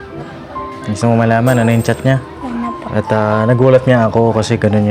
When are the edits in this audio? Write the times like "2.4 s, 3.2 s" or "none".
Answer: 2.8 s

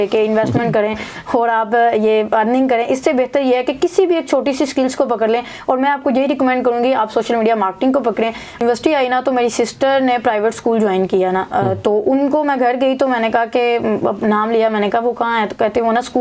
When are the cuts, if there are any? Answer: 8.6 s

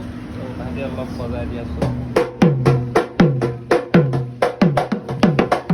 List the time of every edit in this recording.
none

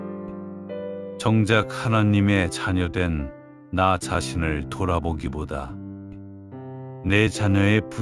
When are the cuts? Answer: 1.0 s

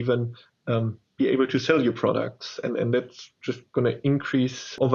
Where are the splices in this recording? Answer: none

